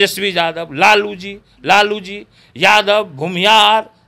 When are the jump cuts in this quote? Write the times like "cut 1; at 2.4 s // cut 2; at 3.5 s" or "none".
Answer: none